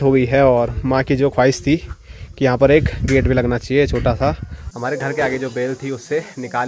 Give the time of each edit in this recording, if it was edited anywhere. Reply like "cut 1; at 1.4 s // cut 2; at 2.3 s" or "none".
cut 1; at 4.6 s